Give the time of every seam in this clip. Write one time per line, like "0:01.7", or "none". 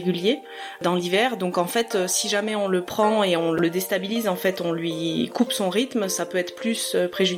none